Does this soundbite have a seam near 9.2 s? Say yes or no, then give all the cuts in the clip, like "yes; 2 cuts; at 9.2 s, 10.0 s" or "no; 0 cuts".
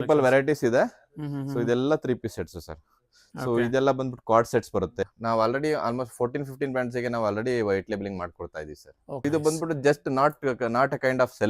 yes; 2 cuts; at 5.0 s, 9.2 s